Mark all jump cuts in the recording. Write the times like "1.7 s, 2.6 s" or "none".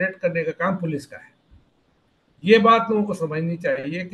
none